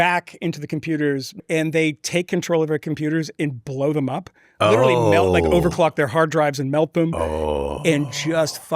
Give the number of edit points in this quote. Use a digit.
2